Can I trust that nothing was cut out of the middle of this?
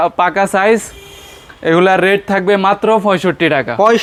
yes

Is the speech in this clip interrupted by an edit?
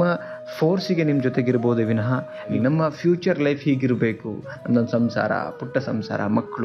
yes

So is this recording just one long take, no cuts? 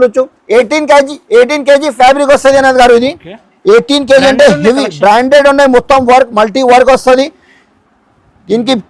yes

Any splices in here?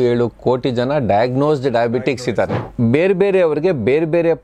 yes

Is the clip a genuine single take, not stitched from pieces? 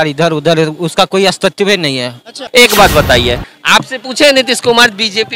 no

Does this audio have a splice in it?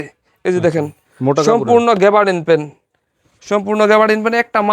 no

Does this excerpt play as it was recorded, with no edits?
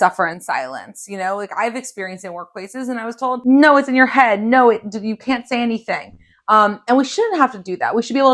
no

